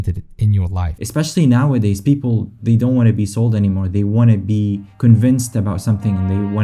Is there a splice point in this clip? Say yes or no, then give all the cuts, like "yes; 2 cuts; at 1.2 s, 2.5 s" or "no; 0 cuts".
yes; 1 cut; at 0.9 s